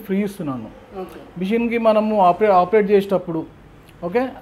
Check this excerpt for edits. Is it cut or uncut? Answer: uncut